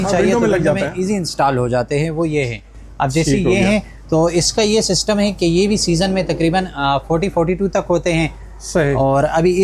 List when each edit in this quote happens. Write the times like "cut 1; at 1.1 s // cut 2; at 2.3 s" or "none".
none